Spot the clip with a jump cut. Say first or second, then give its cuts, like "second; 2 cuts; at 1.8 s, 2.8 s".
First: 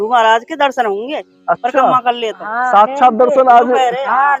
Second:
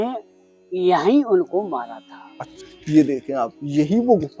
second; 1 cut; at 2.6 s